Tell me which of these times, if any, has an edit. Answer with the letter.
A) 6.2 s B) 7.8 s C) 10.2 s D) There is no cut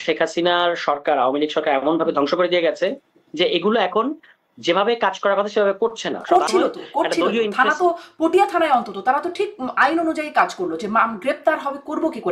A